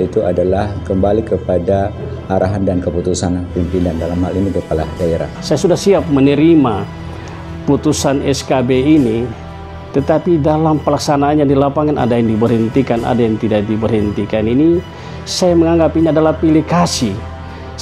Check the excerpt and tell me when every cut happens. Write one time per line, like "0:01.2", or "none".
0:05.3